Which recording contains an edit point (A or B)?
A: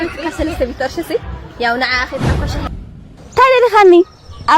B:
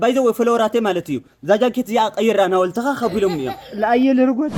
A